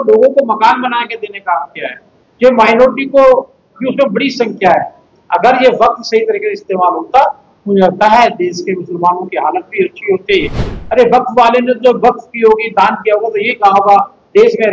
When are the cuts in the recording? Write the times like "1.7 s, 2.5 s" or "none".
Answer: 10.7 s

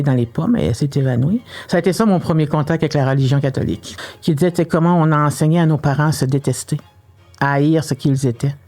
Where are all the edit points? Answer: 3.9 s

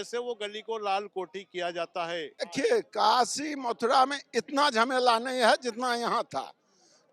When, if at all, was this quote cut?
2.4 s

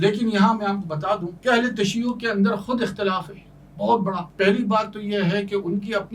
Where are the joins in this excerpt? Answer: 1.3 s, 4.3 s

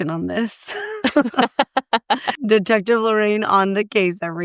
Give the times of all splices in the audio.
2.3 s

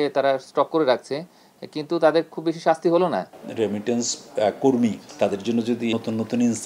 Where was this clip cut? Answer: 3.4 s, 5.0 s, 5.9 s

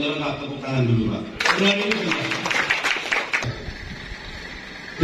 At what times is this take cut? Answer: 3.4 s

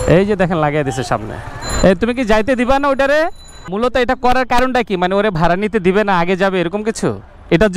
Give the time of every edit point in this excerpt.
3.5 s

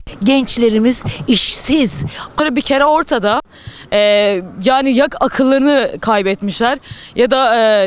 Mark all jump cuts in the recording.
2.4 s

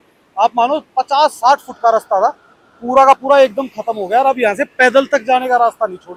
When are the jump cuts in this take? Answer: none

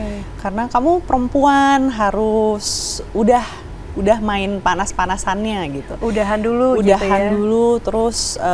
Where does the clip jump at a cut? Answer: none

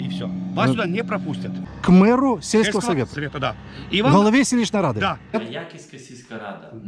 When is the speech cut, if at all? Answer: 1.5 s, 5.3 s

